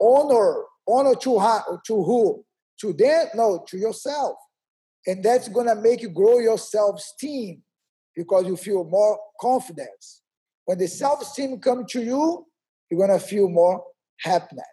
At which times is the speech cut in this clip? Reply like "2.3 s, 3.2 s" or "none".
none